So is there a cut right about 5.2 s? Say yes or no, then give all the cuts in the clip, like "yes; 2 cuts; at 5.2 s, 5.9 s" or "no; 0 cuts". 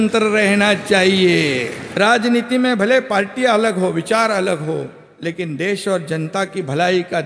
no; 1 cut; at 1.8 s